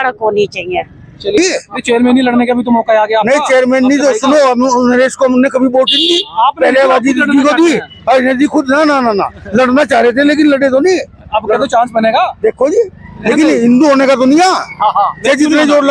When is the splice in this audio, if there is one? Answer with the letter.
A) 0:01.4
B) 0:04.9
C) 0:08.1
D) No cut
A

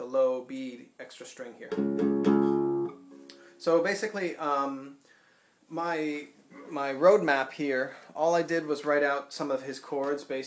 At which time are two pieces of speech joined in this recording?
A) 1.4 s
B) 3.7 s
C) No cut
B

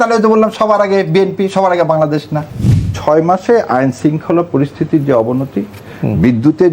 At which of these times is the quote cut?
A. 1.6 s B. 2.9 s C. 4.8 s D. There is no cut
B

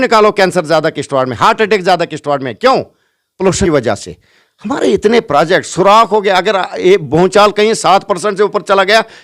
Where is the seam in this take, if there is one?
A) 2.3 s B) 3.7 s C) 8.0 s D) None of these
B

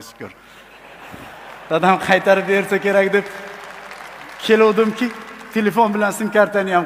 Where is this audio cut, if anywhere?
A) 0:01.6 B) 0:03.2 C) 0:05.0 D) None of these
D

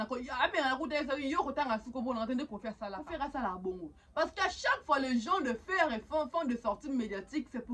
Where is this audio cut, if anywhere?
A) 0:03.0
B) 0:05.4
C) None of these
A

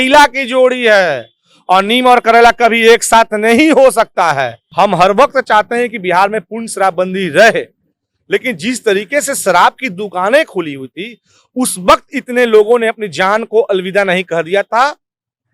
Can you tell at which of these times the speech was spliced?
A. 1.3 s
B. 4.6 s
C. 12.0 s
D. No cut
B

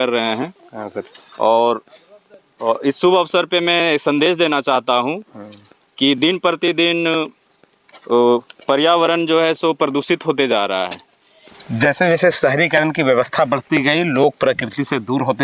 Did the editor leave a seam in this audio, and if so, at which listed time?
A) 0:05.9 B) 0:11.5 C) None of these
B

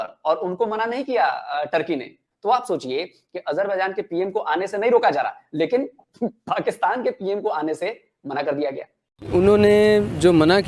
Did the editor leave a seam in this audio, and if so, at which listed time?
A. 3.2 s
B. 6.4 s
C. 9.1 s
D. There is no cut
C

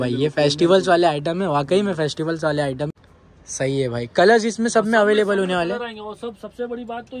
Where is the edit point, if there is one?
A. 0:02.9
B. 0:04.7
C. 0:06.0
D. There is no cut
A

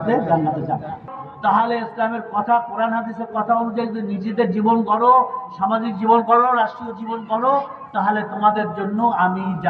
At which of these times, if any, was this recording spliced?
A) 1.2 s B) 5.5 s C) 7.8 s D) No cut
A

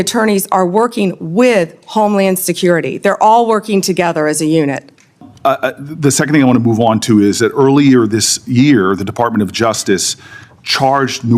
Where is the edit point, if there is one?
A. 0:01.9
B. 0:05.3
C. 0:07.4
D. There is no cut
B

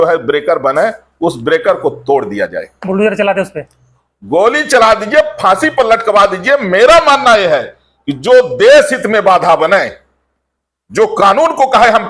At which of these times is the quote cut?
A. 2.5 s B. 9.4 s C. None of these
C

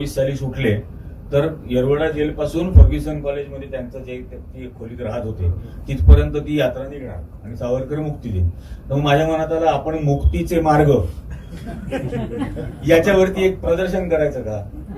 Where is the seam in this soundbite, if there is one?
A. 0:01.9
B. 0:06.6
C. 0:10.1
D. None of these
D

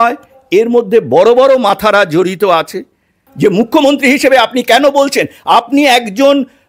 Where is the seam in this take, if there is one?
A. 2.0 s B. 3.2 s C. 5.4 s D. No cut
B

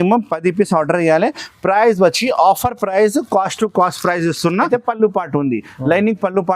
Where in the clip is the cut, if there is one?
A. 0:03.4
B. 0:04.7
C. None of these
B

